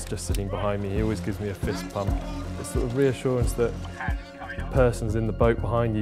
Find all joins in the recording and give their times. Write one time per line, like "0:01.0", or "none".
0:04.3